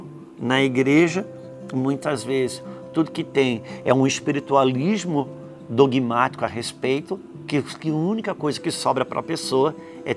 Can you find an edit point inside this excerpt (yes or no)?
yes